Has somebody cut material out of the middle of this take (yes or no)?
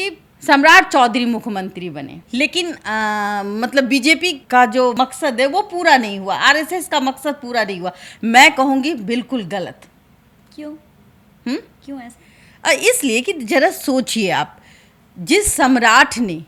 no